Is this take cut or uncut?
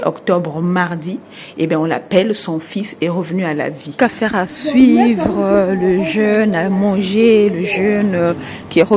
cut